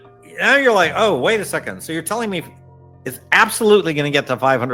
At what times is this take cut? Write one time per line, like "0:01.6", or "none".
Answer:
none